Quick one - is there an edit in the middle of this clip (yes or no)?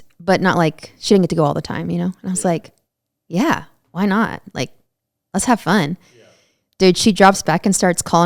no